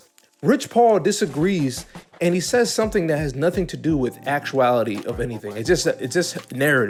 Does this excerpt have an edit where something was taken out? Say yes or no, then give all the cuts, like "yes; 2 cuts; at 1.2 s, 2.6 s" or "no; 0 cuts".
no; 0 cuts